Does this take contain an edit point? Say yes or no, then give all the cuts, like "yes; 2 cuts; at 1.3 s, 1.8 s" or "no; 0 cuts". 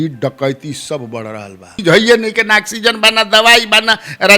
yes; 1 cut; at 1.7 s